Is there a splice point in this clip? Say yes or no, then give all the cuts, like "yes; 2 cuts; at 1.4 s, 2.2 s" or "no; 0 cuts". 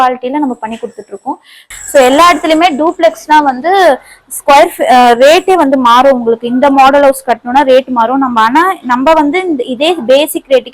yes; 1 cut; at 1.7 s